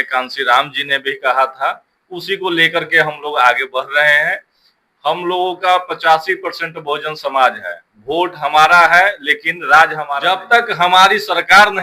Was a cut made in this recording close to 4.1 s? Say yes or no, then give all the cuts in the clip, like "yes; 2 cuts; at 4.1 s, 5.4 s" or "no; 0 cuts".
no; 1 cut; at 10.1 s